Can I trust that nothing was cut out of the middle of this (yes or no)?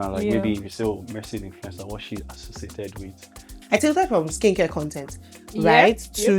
no